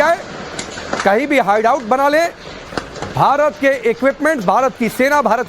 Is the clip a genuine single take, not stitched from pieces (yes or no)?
no